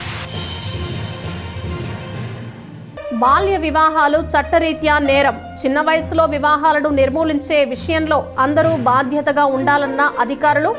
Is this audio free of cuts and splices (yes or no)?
no